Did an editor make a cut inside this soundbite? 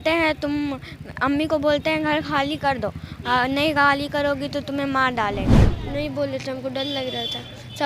yes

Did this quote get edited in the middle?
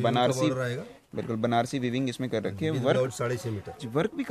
no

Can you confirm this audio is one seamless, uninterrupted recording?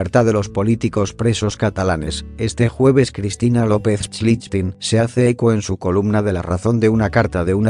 yes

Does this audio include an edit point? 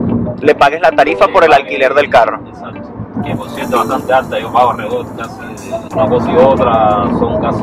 yes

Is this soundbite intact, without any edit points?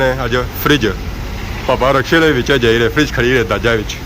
yes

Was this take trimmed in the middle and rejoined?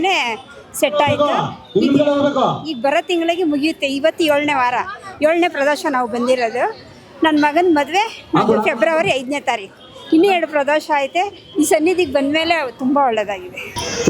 no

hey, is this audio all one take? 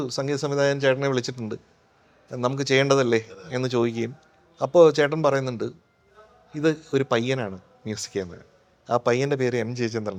yes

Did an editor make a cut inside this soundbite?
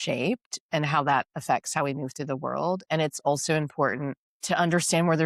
no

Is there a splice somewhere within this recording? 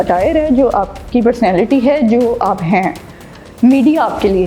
no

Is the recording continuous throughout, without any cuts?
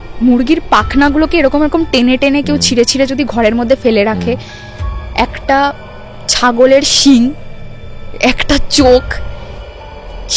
yes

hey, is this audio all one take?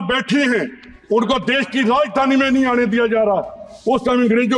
yes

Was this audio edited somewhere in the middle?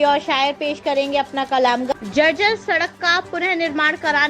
yes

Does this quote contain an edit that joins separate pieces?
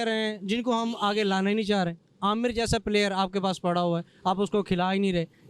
no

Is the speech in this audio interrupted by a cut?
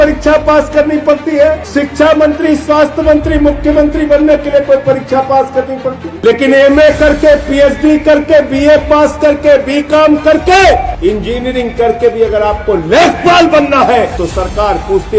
yes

